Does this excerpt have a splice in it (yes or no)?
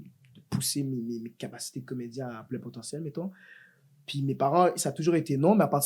no